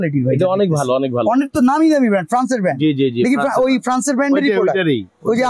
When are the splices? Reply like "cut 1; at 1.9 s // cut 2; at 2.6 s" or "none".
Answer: none